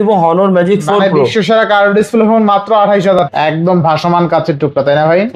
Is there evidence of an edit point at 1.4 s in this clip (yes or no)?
no